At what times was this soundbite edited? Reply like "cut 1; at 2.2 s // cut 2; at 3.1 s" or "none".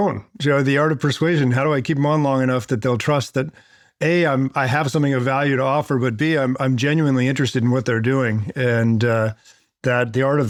none